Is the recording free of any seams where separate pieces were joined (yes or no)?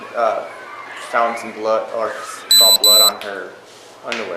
yes